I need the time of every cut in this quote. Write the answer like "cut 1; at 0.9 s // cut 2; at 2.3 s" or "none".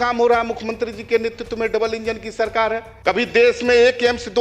cut 1; at 2.9 s